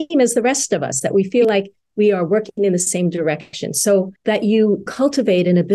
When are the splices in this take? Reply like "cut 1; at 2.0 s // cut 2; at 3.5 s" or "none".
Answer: cut 1; at 4.1 s // cut 2; at 4.9 s